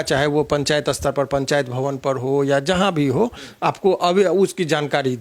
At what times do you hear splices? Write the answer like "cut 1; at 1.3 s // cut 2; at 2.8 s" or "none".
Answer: none